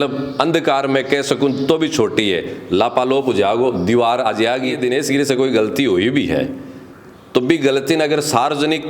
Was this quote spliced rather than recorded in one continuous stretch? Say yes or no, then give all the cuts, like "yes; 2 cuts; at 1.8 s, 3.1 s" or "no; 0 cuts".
yes; 1 cut; at 4.8 s